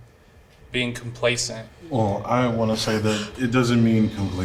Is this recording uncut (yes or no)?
yes